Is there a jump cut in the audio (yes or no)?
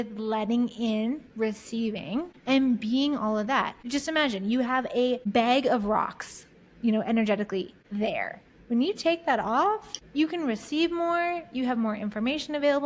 yes